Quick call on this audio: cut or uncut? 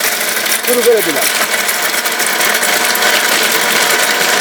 uncut